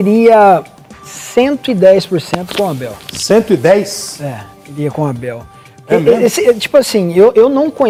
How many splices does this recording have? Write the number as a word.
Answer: zero